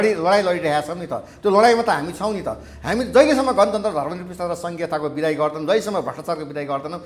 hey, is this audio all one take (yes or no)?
yes